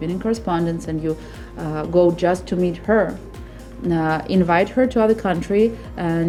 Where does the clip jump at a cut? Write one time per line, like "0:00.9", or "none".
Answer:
none